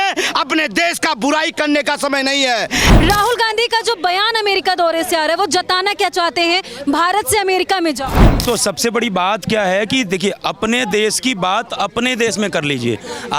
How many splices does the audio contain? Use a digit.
2